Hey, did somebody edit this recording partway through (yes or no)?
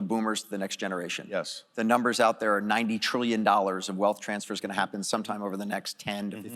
no